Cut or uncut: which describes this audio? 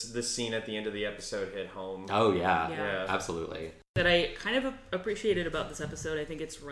cut